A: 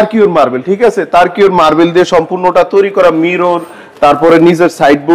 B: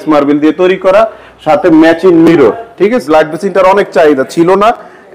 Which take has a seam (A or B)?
B